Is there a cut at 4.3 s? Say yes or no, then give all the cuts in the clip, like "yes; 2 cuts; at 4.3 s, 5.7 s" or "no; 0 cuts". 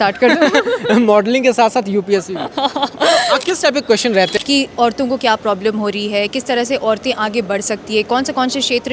yes; 1 cut; at 4.3 s